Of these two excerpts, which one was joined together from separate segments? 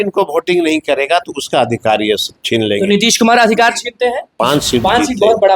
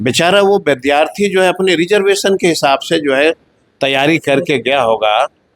first; 1 cut; at 4.3 s

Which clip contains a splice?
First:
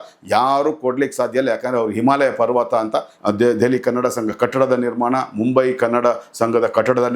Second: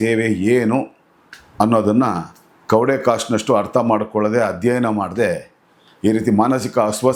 first; 1 cut; at 3.1 s

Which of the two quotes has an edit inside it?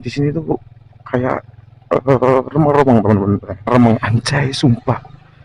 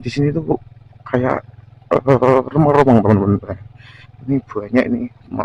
first; 1 cut; at 3.7 s

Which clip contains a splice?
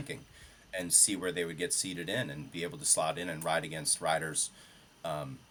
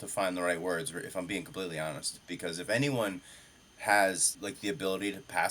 second; 1 cut; at 4.3 s

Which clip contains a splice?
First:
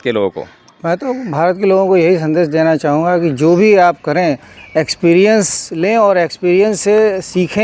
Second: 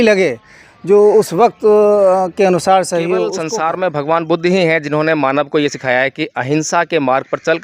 second; 1 cut; at 3.4 s

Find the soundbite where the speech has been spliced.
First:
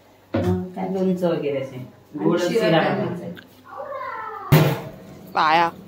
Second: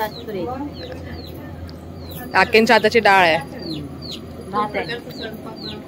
first; 1 cut; at 4.5 s

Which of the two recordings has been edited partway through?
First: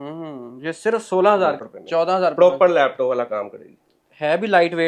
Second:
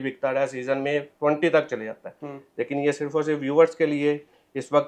first; 1 cut; at 1.6 s

